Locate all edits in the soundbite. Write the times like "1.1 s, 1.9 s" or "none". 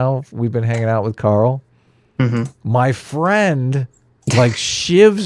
none